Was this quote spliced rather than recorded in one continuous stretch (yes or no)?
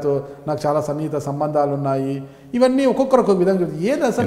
no